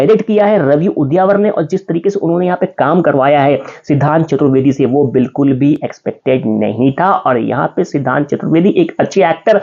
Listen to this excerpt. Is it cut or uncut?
uncut